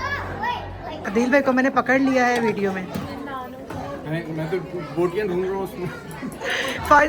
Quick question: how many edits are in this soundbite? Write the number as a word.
one